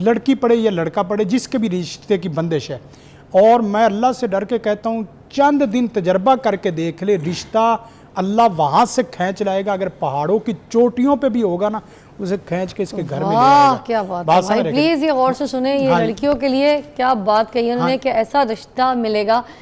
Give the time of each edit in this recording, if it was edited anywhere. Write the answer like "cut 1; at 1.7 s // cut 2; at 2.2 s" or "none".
none